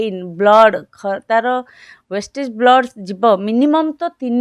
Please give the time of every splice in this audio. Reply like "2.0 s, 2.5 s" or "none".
none

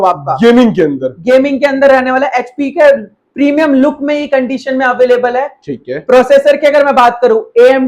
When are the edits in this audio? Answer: none

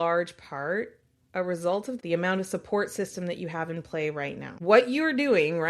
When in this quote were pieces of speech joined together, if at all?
2.0 s, 4.5 s

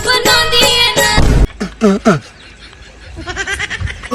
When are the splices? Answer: 1.5 s

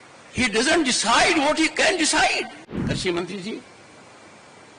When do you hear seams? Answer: 2.7 s

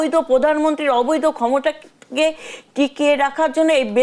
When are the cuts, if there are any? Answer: none

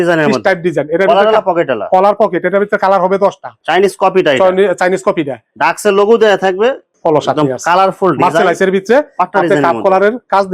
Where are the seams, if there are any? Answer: 3.5 s, 6.9 s

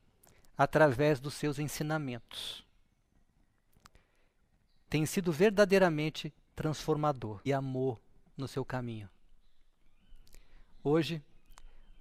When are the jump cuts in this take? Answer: none

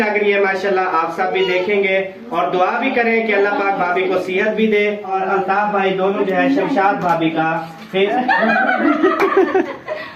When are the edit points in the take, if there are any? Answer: 5.2 s, 8.1 s

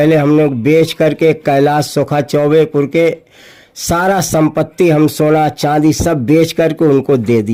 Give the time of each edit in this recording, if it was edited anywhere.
none

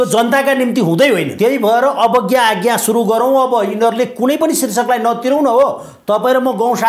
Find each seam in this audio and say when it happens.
1.3 s

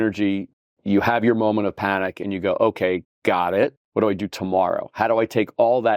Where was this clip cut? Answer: 3.8 s

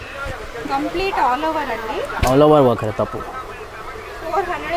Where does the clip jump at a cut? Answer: none

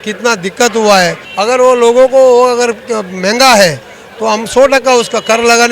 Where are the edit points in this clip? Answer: 1.2 s

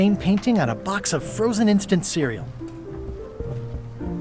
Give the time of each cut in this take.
none

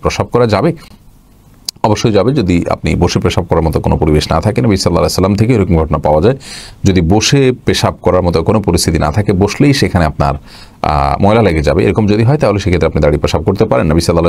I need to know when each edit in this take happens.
none

